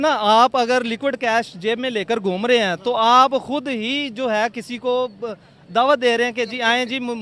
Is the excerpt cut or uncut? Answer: uncut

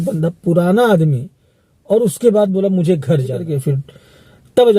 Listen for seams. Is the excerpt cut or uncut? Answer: cut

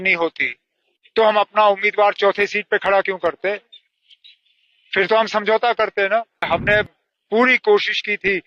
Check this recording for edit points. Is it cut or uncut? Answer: cut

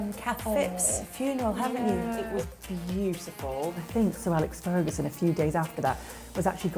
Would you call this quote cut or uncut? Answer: cut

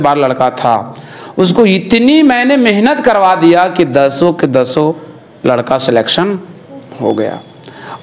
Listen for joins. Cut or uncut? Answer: uncut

